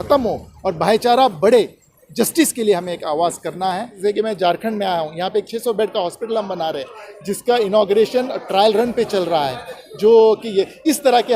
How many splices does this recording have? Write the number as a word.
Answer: one